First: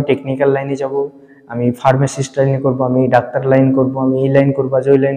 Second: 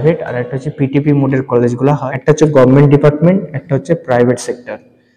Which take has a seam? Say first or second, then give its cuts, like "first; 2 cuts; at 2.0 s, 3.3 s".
second; 1 cut; at 2.0 s